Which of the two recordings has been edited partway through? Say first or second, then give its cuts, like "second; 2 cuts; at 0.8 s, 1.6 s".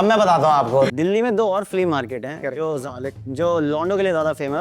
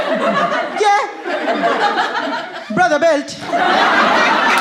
first; 1 cut; at 0.9 s